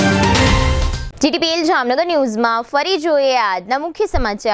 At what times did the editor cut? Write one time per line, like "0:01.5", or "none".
none